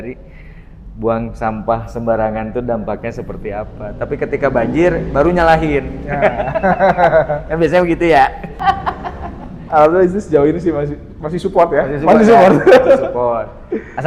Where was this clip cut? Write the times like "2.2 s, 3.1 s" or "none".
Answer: 8.6 s